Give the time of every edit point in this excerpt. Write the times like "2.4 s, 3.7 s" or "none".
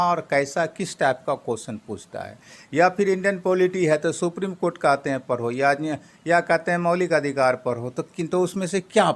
none